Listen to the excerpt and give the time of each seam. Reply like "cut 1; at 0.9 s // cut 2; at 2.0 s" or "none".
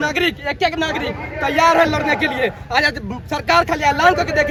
none